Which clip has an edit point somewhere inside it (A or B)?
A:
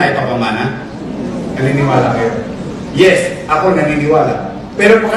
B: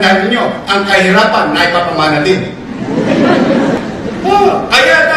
B